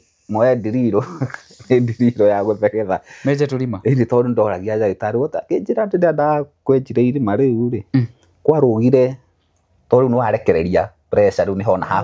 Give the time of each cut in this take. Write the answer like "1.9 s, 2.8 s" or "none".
none